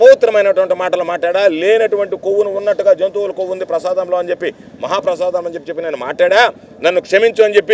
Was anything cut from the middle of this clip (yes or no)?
no